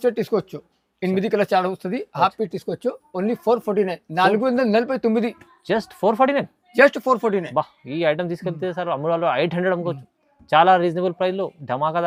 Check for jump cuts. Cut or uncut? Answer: uncut